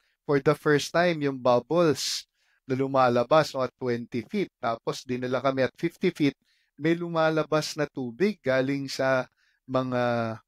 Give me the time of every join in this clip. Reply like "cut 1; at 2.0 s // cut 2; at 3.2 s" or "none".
none